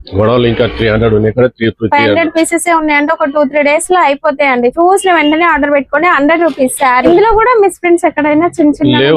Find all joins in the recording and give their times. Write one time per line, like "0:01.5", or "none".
0:07.1